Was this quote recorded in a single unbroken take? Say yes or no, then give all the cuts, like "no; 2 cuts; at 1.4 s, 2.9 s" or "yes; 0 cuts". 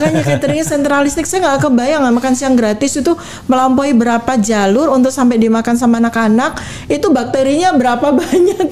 yes; 0 cuts